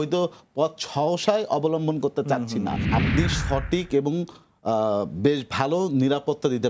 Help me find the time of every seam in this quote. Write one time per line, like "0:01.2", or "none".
0:02.8

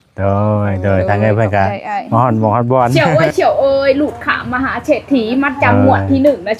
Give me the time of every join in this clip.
0:02.9

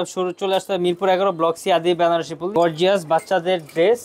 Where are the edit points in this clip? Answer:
0:02.4

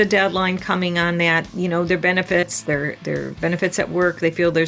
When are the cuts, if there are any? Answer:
0:01.5

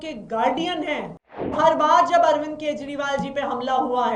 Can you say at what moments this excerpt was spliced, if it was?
0:01.5

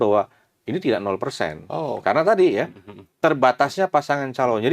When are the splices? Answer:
none

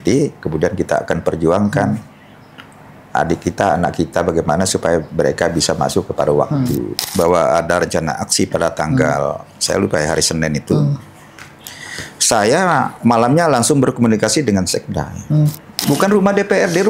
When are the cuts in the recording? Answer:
0:06.9
0:15.6

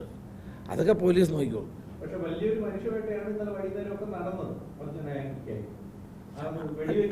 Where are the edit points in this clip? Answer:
none

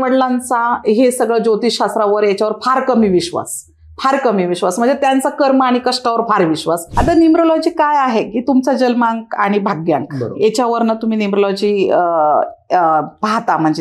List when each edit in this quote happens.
0:06.9

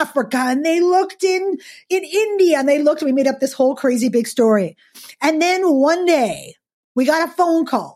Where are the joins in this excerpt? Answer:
0:01.8

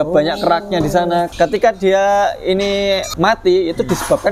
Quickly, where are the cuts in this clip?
0:01.3
0:03.1

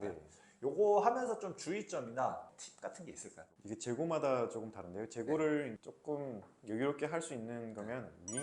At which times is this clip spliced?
0:02.4

